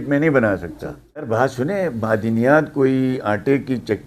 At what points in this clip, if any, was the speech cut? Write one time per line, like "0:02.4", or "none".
0:01.3